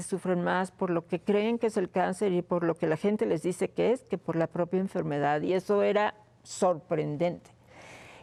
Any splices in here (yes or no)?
no